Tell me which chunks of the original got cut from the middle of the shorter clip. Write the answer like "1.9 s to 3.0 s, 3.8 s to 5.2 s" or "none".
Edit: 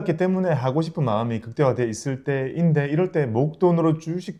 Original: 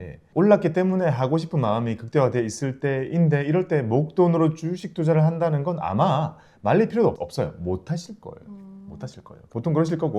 none

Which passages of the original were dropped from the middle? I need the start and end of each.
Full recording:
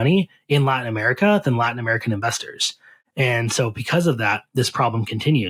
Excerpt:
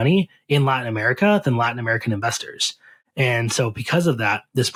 none

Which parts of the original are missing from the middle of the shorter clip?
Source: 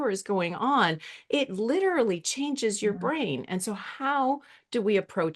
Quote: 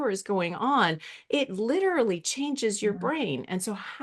none

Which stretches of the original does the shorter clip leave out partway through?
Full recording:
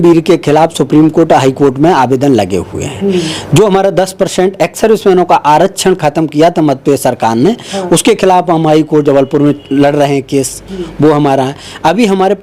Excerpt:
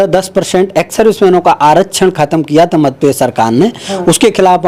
none

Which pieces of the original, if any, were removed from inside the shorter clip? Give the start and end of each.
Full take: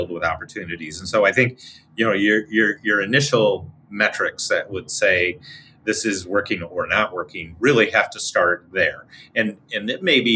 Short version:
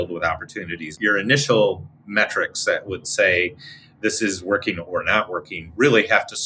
0.9 s to 2.8 s

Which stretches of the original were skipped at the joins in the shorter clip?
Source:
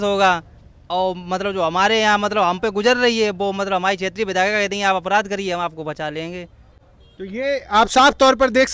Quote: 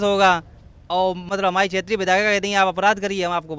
1.3 s to 3.5 s

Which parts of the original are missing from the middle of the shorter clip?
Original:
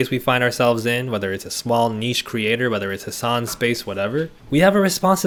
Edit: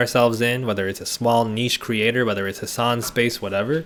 none

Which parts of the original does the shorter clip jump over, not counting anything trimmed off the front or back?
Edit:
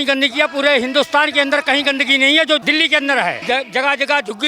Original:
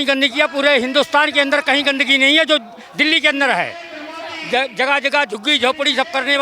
2.6 s to 3.0 s, 3.7 s to 4.4 s

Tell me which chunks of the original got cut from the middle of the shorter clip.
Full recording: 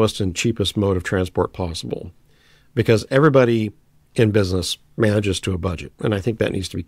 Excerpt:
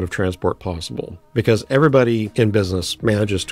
2.1 s to 2.6 s, 4.1 s to 4.6 s

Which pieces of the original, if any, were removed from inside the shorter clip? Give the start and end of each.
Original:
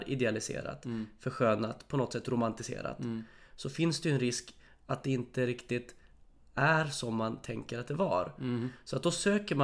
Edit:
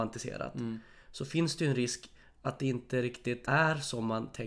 5.9 s to 6.5 s

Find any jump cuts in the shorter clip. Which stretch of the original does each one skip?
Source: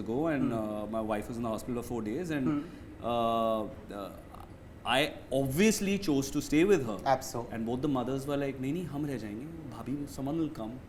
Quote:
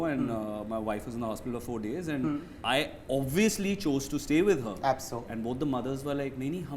2.7 s to 4.7 s

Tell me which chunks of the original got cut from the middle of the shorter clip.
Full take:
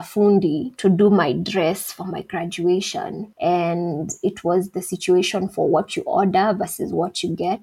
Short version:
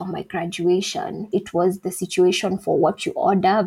3.2 s to 4.1 s

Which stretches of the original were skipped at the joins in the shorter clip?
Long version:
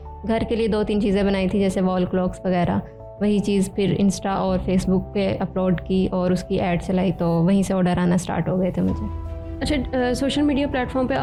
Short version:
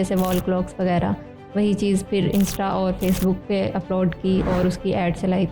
none

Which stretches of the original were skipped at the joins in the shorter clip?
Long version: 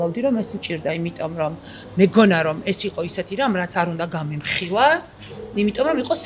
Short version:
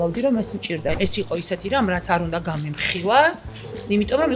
1.0 s to 2.6 s

